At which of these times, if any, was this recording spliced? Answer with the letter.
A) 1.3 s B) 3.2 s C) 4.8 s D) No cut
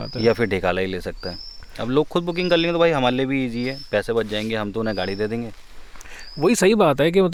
D